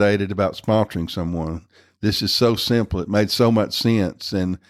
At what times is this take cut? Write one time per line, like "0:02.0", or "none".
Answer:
none